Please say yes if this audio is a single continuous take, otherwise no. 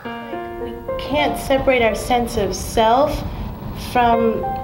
no